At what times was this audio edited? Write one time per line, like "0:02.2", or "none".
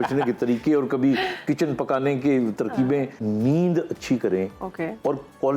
0:03.1